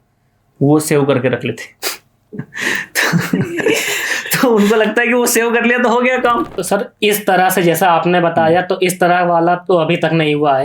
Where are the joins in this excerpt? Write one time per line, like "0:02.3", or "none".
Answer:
0:06.5